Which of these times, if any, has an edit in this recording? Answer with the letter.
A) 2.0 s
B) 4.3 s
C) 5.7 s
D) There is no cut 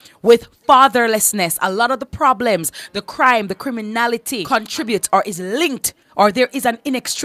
B